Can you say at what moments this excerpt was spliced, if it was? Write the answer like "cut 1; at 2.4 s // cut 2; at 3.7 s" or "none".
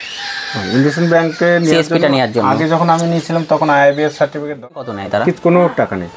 cut 1; at 4.6 s